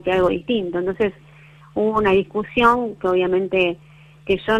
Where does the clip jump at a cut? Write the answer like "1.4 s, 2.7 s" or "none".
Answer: none